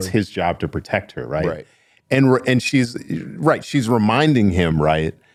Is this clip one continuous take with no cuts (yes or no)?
yes